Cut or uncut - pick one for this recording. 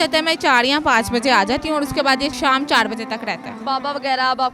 cut